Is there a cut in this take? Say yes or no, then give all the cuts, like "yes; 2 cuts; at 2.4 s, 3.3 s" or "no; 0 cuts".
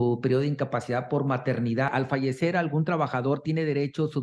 yes; 1 cut; at 1.9 s